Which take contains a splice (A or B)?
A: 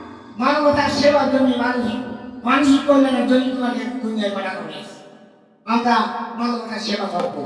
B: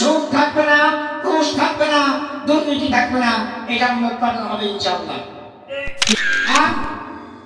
B